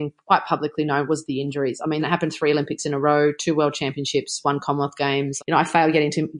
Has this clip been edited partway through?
yes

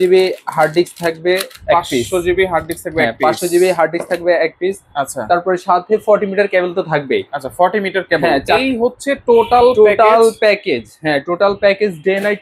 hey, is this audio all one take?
yes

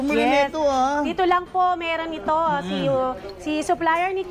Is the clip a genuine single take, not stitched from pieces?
yes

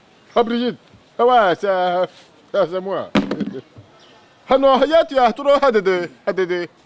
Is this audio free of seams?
yes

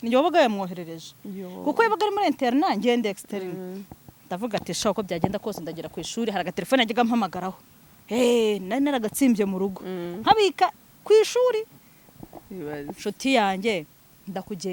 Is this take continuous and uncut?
yes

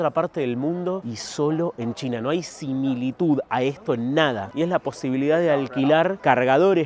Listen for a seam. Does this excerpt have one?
no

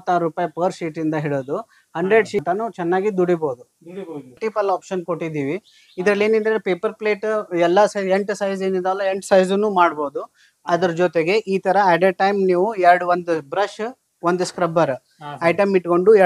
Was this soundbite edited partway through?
yes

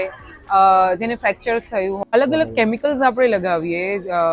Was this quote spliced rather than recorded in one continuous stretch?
yes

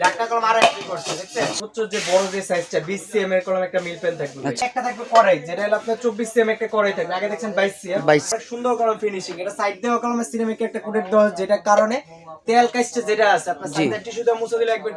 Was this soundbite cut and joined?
yes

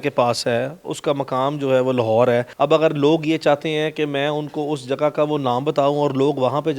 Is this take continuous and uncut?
yes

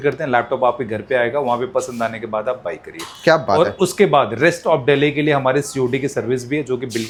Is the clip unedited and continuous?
yes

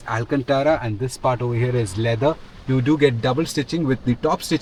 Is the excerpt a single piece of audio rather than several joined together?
yes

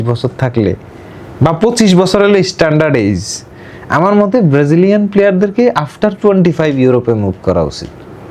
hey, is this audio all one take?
yes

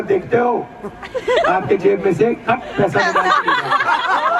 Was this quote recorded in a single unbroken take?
yes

